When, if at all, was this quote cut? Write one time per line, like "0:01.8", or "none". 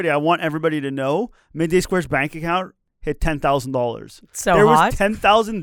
0:02.9